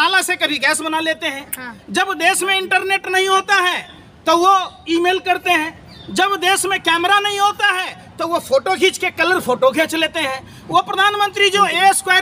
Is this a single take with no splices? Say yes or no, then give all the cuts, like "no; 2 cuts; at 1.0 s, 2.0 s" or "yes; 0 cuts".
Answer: yes; 0 cuts